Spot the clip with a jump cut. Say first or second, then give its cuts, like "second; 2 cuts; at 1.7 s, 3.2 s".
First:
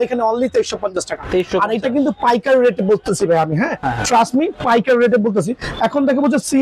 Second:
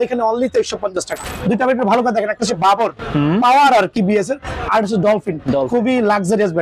second; 1 cut; at 1.2 s